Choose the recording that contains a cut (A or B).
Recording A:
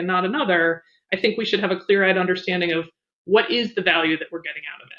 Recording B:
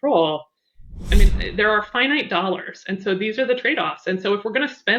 B